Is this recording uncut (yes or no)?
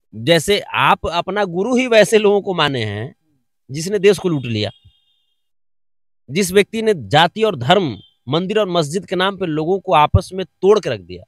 yes